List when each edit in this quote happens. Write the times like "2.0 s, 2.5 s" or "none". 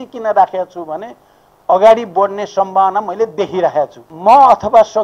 4.0 s